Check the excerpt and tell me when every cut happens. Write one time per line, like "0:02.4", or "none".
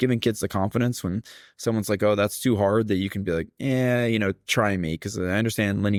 none

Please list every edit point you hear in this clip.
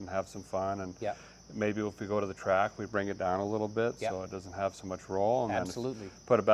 none

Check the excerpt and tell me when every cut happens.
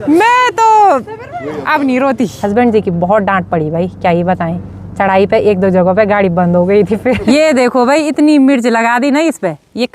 0:02.4
0:07.2

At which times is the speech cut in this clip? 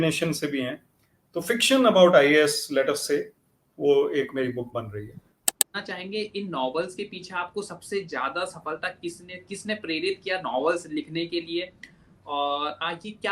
0:05.8

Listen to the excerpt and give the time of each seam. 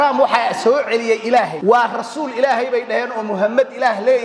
0:01.5

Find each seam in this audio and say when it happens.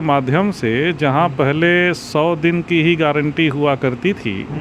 none

